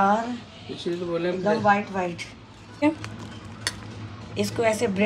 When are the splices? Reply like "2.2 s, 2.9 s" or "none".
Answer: 2.8 s